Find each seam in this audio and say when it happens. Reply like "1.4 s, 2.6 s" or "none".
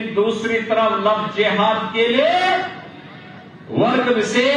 none